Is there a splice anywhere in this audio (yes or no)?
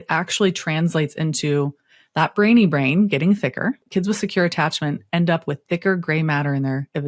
yes